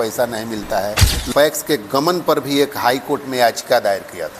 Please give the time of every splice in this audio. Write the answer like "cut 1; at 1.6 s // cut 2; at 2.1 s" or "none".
cut 1; at 1.1 s